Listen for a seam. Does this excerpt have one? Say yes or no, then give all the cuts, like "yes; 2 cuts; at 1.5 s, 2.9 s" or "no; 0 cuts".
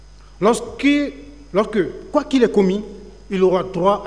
no; 0 cuts